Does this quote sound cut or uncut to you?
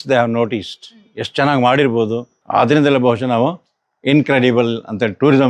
cut